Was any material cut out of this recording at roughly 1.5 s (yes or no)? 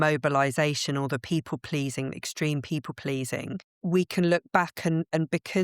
no